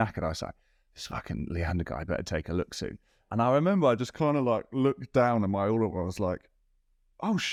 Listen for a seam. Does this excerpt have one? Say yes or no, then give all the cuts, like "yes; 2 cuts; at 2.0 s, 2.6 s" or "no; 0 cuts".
no; 0 cuts